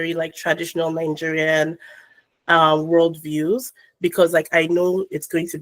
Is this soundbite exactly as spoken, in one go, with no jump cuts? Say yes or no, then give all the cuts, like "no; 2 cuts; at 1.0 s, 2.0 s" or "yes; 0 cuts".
yes; 0 cuts